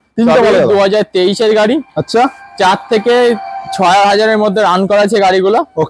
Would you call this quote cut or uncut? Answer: uncut